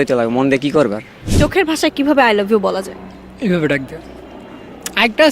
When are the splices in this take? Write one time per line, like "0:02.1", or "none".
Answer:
0:01.2